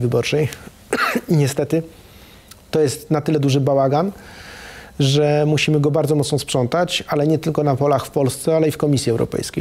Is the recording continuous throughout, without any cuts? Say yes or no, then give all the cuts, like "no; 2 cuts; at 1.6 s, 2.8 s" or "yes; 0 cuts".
yes; 0 cuts